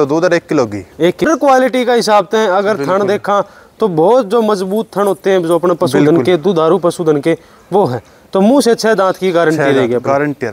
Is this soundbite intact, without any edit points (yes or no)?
no